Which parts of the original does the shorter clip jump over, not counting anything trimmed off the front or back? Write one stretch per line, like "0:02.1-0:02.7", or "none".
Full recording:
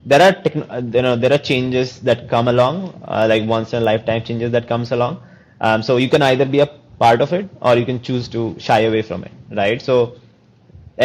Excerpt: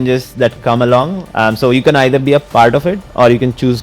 0:02.9-0:05.5
0:06.7-0:06.9